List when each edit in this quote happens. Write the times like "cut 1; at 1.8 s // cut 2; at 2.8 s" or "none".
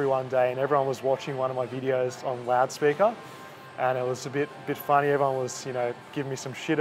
none

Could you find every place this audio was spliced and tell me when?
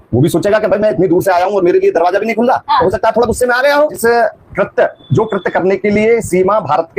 cut 1; at 4.0 s

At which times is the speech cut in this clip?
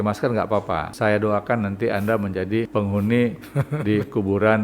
cut 1; at 0.9 s // cut 2; at 2.7 s

